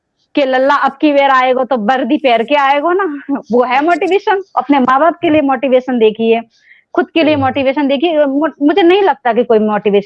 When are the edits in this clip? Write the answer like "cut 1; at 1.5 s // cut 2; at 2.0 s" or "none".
none

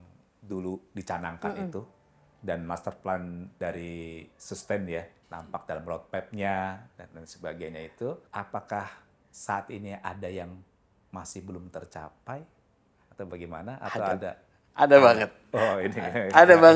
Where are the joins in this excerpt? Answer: none

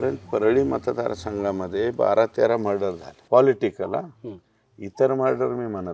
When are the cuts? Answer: cut 1; at 3.1 s

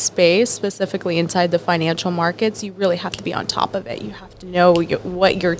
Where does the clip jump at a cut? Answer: none

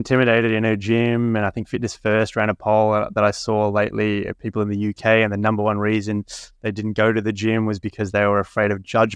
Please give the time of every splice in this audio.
none

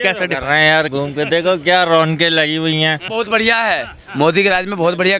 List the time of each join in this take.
cut 1; at 3.1 s

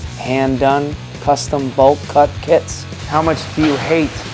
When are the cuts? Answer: cut 1; at 2.9 s

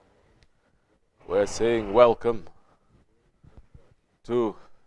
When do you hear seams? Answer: none

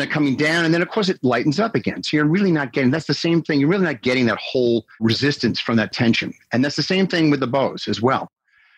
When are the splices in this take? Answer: none

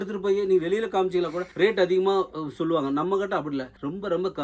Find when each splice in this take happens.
none

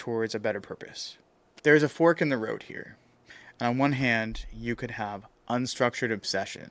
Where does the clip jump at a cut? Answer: none

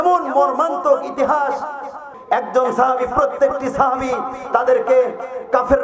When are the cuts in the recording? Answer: cut 1; at 2.0 s

